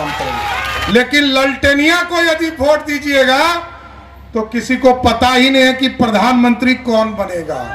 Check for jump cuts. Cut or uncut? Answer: cut